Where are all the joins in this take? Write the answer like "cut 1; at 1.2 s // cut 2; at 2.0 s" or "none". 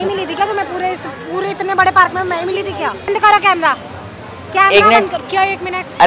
cut 1; at 3.1 s